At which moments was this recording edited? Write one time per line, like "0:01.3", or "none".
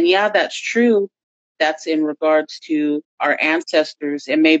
0:01.3
0:03.1